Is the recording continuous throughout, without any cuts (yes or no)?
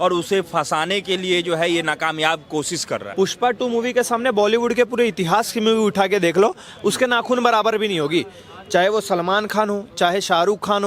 no